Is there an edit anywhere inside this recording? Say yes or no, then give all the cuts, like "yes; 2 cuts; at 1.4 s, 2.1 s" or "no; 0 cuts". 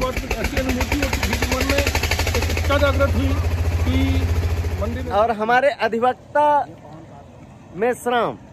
yes; 1 cut; at 4.9 s